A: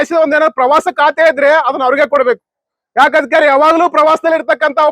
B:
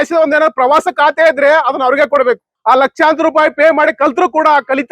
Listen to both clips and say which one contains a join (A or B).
B